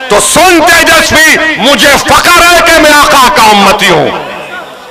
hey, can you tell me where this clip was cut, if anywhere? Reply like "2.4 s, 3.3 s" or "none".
none